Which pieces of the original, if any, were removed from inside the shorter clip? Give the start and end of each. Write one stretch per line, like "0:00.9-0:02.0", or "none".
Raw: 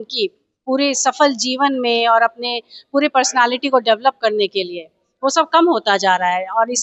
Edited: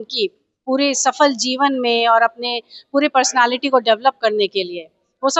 none